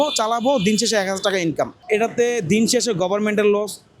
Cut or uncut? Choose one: cut